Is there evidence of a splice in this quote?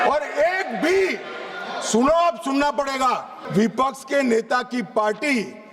yes; 1 cut; at 3.4 s

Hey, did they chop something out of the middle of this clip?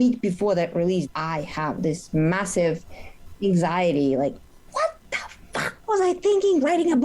yes; 1 cut; at 1.1 s

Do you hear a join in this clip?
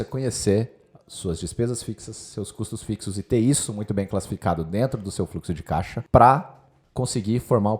yes; 1 cut; at 6.0 s

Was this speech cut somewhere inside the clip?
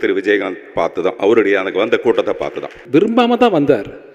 yes; 1 cut; at 2.7 s

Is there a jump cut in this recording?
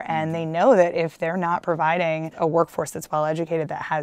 yes; 1 cut; at 2.3 s

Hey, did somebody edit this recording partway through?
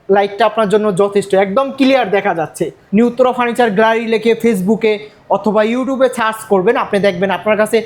yes; 1 cut; at 2.7 s

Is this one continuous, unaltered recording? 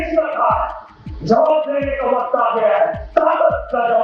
yes; 0 cuts

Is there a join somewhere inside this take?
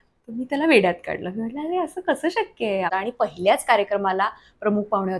yes; 1 cut; at 2.9 s

